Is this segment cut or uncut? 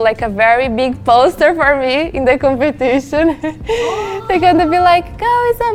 uncut